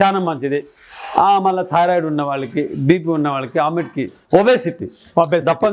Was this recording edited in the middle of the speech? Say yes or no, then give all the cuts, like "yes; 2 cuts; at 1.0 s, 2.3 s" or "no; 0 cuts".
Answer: yes; 1 cut; at 4.2 s